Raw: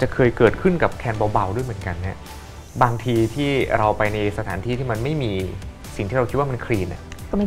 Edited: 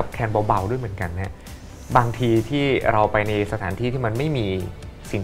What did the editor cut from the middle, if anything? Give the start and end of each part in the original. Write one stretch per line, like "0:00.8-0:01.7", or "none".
none